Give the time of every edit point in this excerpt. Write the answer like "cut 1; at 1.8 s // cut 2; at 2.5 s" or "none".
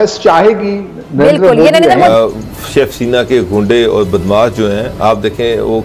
cut 1; at 2.1 s